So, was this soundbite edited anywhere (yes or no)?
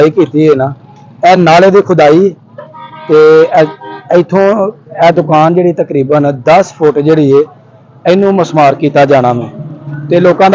no